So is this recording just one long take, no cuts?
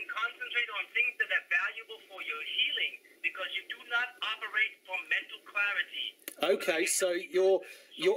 yes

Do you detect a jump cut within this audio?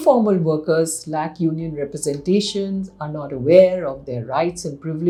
no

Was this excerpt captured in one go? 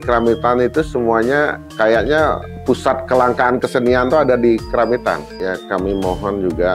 no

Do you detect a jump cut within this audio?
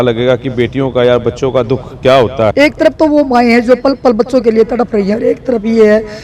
yes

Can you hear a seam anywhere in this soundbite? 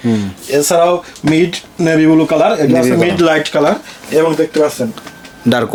no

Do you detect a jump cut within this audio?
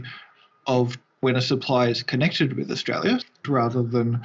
yes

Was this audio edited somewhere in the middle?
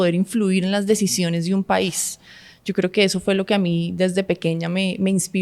no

